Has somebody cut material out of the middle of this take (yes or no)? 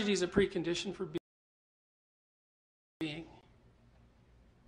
no